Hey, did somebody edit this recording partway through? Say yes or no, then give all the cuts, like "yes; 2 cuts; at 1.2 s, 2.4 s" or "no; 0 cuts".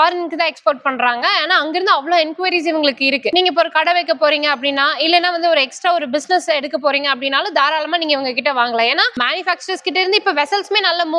no; 0 cuts